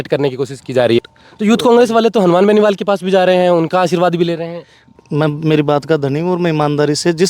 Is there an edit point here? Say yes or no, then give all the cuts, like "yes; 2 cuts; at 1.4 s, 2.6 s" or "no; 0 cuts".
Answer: yes; 2 cuts; at 1.0 s, 5.0 s